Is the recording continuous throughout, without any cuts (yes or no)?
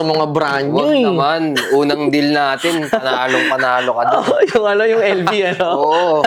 yes